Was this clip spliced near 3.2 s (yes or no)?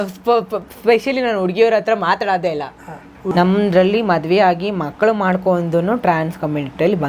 yes